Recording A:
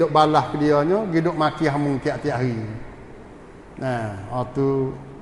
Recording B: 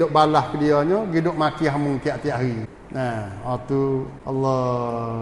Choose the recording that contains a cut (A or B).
B